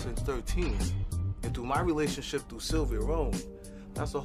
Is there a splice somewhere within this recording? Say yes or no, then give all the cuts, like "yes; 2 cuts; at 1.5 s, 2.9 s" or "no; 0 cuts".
no; 0 cuts